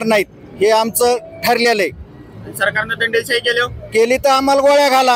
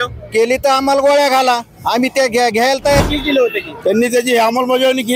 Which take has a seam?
second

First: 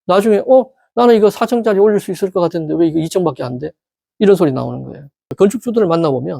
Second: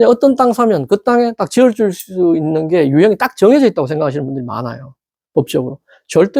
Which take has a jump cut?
first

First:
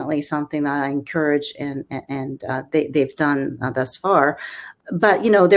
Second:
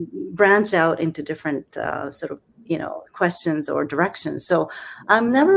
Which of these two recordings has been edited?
first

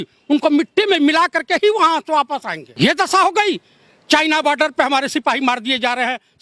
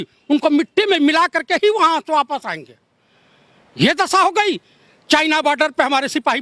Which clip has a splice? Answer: first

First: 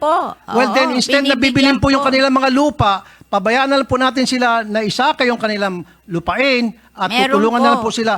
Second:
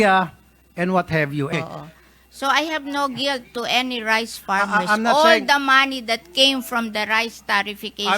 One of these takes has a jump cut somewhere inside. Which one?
second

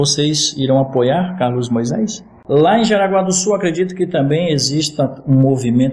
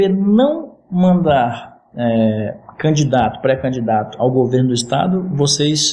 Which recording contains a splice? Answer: first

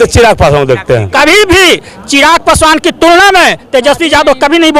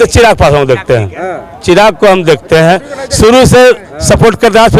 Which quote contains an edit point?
first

